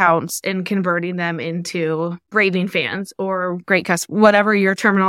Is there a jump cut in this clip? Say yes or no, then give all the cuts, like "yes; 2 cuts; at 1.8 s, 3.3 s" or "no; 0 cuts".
yes; 1 cut; at 2.2 s